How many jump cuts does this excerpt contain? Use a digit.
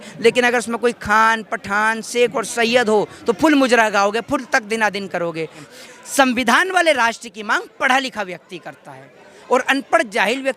1